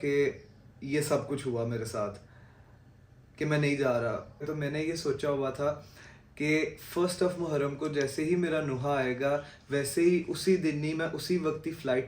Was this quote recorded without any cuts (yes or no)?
no